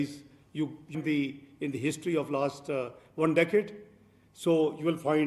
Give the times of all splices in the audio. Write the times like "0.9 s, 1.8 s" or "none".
0.9 s